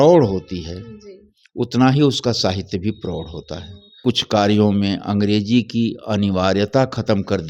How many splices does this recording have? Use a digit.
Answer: 1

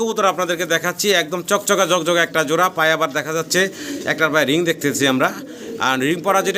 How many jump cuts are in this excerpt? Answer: 0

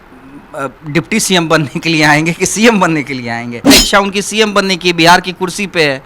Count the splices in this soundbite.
1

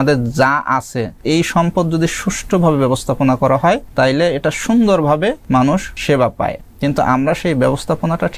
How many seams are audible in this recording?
4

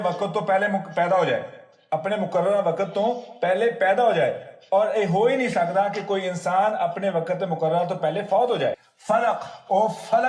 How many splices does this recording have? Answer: 1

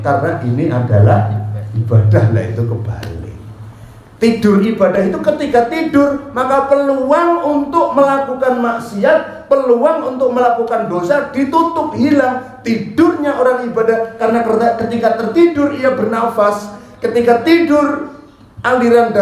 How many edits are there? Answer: 0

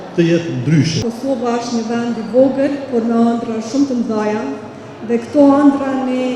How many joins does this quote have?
1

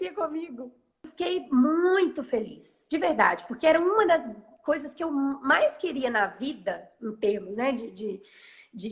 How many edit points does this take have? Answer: 1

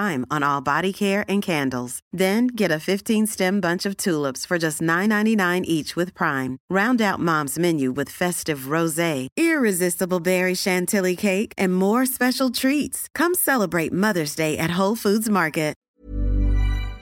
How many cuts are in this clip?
1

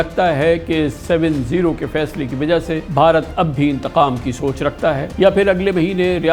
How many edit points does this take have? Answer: 2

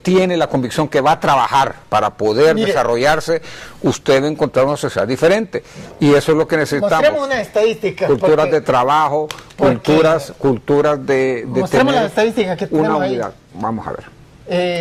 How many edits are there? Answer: 0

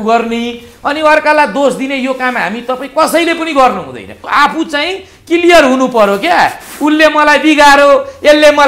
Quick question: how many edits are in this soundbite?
1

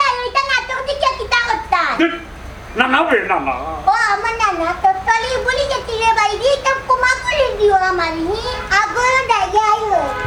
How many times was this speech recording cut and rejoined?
0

